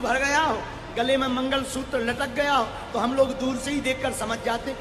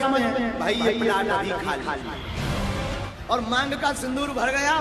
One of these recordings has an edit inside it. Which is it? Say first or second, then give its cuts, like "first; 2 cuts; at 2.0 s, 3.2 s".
second; 1 cut; at 3.1 s